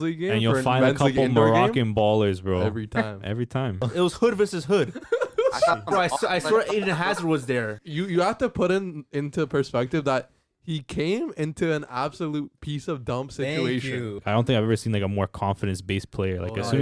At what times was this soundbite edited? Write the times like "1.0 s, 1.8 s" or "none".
3.9 s, 7.8 s, 14.2 s